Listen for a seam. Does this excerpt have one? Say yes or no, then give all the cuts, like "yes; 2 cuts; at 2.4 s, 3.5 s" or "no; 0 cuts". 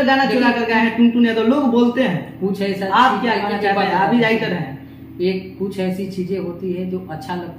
no; 0 cuts